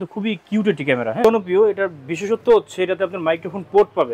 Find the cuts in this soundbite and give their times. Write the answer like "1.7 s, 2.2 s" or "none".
1.2 s